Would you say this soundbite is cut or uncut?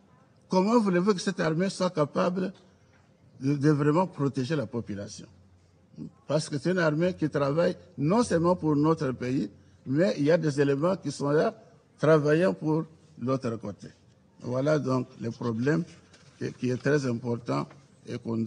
uncut